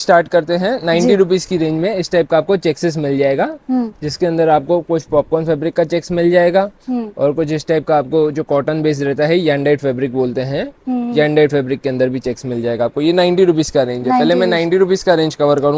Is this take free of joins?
yes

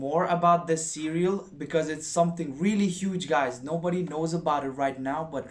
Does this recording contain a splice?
no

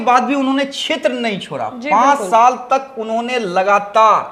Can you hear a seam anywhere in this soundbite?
no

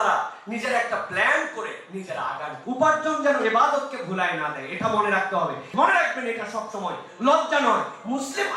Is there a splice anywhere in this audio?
yes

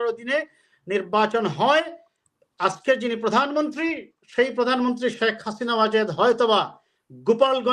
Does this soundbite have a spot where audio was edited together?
no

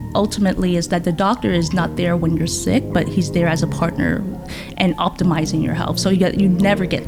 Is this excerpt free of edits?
yes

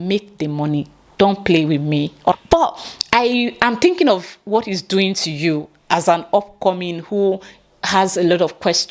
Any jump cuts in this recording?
yes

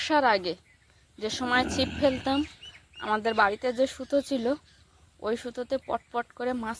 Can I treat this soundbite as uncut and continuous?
yes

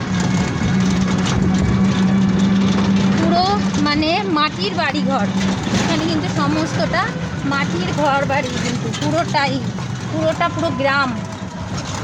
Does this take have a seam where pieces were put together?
no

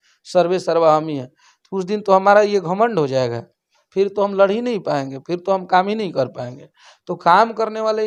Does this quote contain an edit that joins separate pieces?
no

